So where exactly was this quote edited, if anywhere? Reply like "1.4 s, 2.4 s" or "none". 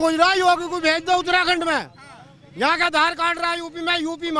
none